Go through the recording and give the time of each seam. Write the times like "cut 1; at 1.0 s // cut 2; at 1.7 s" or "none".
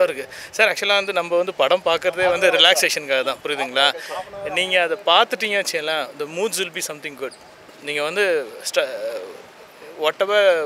none

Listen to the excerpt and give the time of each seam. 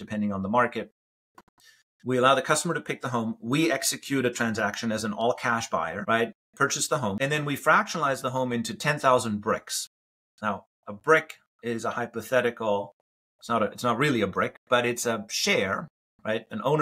cut 1; at 6.0 s // cut 2; at 7.2 s

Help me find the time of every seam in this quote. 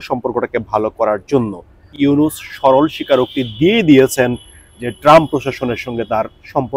cut 1; at 1.9 s

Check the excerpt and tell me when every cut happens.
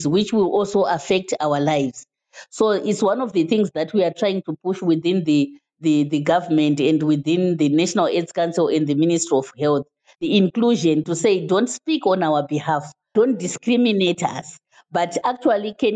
none

